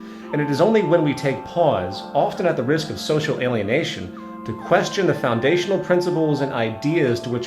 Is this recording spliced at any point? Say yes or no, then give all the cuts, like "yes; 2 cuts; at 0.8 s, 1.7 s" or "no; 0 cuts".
yes; 1 cut; at 4.5 s